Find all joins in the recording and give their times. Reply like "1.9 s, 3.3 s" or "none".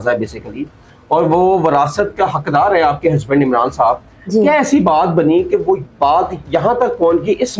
none